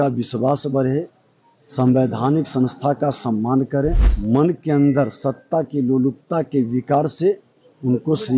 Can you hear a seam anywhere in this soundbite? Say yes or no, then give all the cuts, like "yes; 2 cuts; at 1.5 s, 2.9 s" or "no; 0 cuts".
yes; 1 cut; at 4.1 s